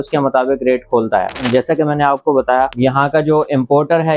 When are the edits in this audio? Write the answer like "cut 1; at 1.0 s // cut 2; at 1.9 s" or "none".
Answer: cut 1; at 1.4 s // cut 2; at 2.7 s